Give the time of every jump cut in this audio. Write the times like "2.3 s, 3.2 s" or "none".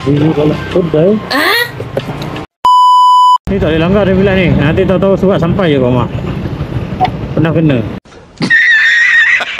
2.5 s, 3.4 s

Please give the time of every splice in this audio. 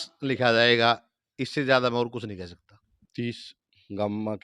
3.0 s

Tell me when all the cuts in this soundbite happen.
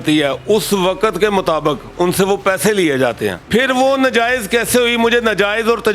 3.4 s

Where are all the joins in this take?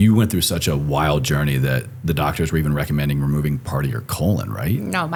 none

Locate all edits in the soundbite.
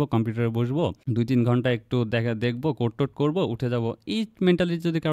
1.0 s

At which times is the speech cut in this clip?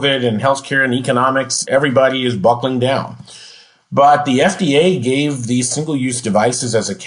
1.6 s

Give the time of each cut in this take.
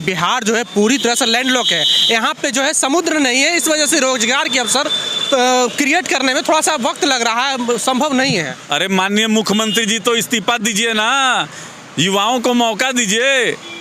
none

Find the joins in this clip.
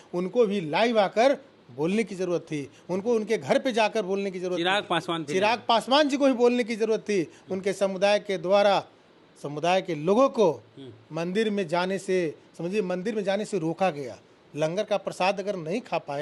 none

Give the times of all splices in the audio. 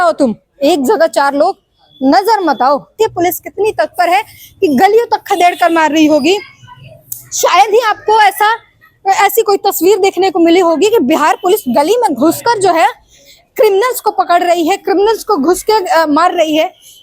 2.9 s

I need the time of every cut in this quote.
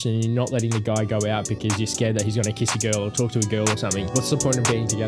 4.1 s

